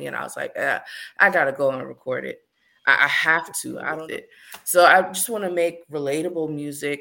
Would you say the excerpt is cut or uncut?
cut